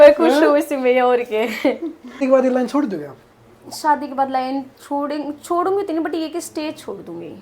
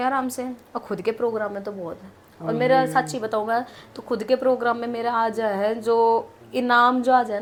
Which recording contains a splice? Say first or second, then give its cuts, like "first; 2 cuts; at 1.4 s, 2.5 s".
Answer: first; 1 cut; at 2.2 s